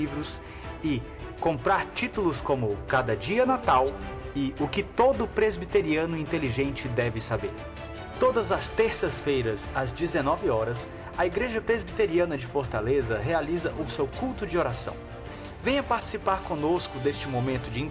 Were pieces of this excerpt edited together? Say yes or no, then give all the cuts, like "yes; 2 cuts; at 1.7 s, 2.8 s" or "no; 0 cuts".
yes; 1 cut; at 15.9 s